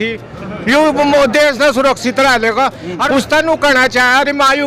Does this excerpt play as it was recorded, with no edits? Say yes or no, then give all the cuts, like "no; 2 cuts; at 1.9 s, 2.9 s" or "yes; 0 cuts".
no; 1 cut; at 3.1 s